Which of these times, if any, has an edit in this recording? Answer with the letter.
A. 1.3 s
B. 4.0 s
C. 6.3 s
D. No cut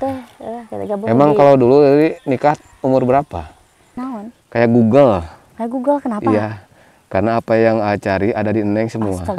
B